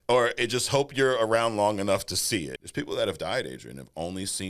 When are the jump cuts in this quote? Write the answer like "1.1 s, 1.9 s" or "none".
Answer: 2.5 s